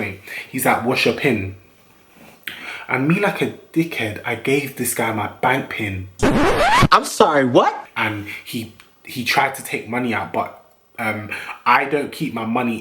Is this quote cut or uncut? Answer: uncut